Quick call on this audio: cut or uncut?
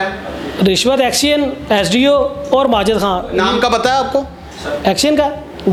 uncut